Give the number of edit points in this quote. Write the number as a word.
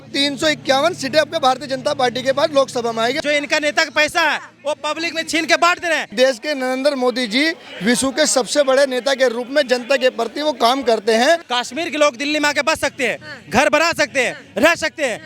three